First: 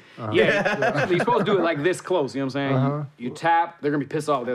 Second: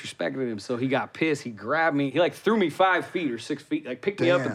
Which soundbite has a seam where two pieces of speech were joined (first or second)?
second